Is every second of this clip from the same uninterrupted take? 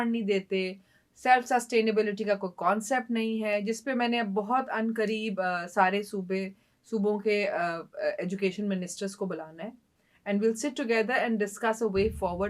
yes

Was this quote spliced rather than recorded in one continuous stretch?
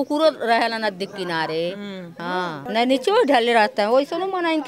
yes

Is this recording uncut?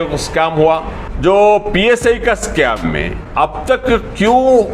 no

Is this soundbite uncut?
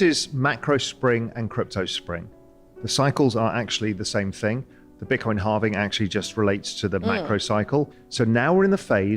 no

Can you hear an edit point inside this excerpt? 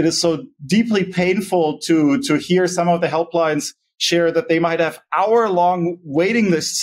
no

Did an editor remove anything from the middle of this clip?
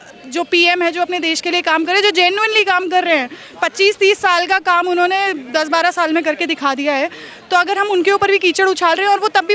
no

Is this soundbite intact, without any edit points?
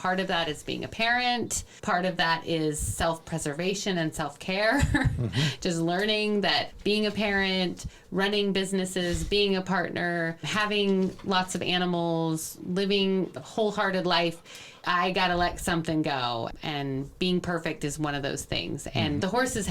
yes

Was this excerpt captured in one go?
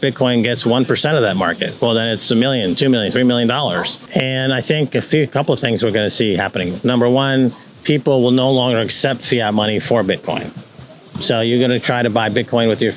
no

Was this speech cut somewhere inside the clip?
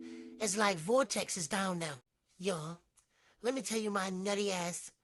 no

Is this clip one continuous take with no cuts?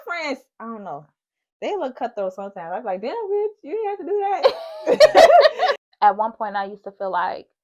no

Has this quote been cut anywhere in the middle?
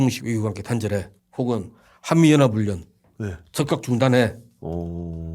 yes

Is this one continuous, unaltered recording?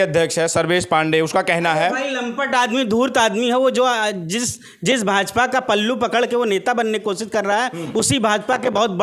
yes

